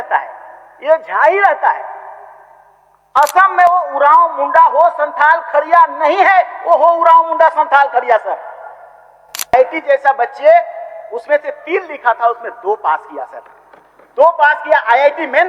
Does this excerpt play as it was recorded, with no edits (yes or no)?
no